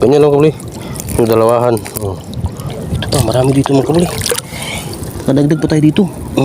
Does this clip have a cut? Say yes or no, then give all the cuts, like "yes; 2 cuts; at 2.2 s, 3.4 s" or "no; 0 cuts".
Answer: yes; 1 cut; at 2.7 s